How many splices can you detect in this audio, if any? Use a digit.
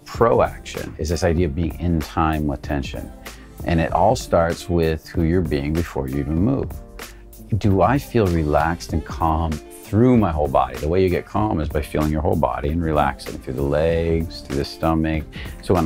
1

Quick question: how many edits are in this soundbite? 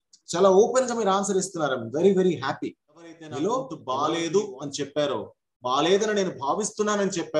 1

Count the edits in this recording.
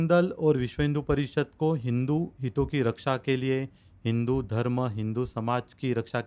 0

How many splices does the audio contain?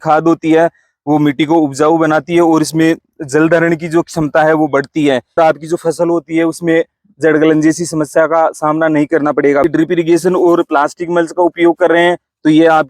2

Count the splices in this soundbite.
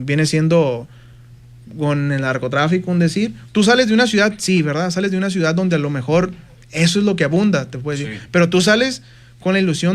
1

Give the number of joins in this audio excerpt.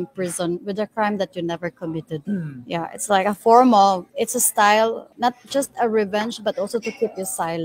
3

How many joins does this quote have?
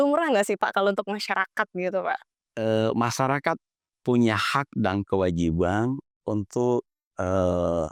0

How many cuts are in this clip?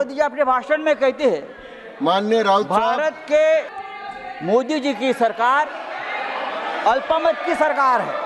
1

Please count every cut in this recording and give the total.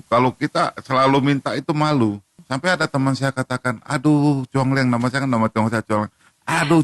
1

